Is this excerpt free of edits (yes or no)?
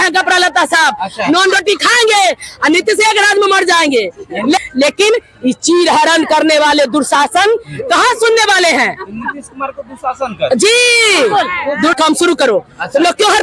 no